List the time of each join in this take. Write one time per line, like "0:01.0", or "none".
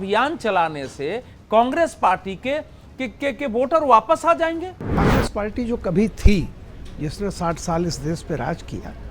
0:05.0